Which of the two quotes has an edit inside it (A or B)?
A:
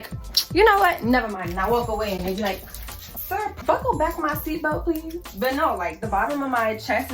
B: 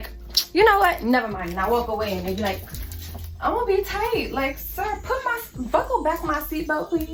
A